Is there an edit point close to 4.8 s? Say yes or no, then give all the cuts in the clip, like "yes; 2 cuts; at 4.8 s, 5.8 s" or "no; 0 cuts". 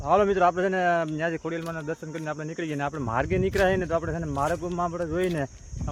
no; 0 cuts